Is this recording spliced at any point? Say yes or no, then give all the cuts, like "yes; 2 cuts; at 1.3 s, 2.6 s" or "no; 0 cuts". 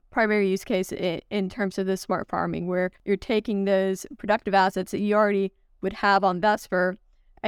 yes; 1 cut; at 3.0 s